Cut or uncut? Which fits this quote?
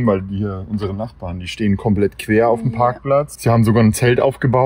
cut